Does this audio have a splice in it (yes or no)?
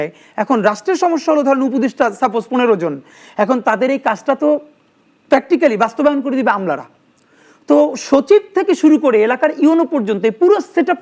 no